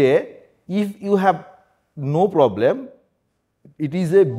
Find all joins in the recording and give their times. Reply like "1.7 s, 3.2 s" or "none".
none